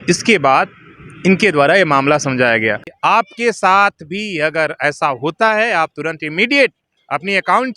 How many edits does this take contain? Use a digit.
1